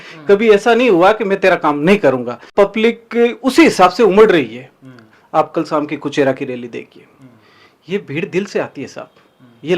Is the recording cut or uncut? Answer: cut